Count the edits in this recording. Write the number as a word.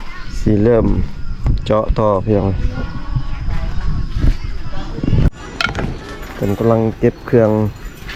one